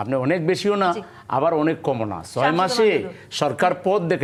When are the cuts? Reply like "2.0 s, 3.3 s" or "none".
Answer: none